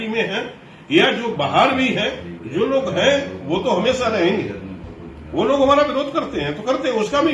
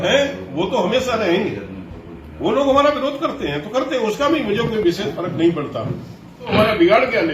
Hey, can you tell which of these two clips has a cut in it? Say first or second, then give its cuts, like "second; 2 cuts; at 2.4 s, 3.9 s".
second; 1 cut; at 6.4 s